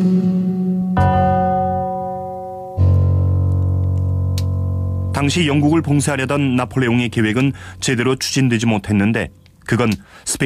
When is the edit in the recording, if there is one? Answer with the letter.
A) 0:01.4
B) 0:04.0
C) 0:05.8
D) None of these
B